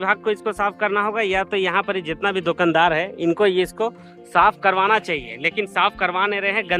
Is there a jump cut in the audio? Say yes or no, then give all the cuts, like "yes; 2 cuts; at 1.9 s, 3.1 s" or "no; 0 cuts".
no; 0 cuts